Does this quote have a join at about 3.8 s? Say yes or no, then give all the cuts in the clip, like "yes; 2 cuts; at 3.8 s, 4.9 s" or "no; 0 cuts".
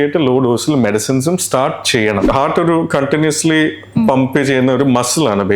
no; 1 cut; at 2.3 s